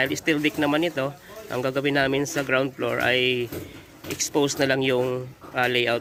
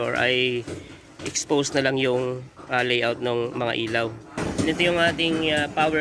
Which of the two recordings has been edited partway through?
second; 1 cut; at 4.4 s

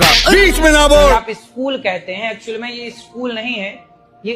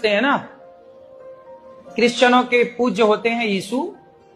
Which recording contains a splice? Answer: first; 1 cut; at 1.1 s

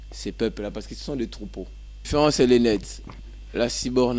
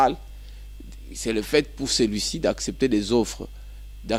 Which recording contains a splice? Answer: first; 1 cut; at 2.0 s

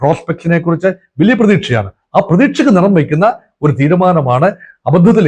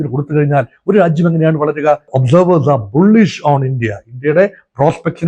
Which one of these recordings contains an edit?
second; 1 cut; at 2.1 s

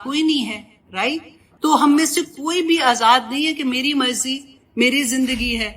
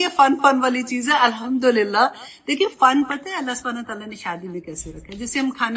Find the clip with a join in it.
first; 1 cut; at 1.4 s

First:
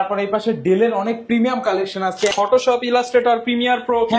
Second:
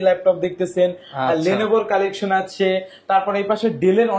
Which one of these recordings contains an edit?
first; 1 cut; at 2.3 s

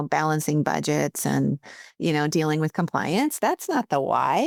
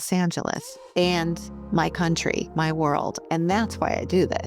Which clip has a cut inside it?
second; 2 cuts; at 1.5 s, 3.2 s

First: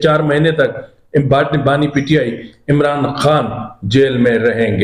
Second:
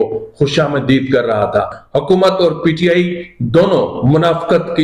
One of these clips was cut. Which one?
second; 1 cut; at 1.8 s

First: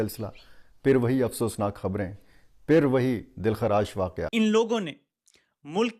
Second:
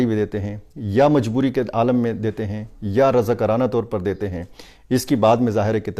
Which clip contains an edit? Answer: first; 1 cut; at 4.2 s

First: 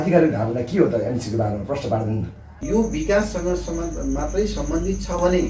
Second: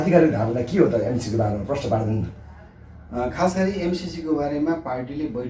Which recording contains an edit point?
first; 1 cut; at 2.5 s

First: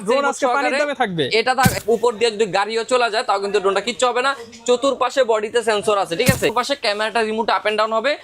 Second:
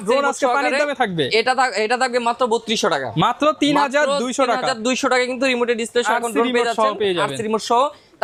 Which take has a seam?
first; 2 cuts; at 1.8 s, 6.5 s

